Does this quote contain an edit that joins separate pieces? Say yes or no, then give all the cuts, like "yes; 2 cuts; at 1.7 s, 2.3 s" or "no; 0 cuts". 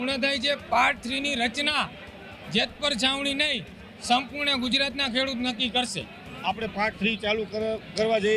no; 0 cuts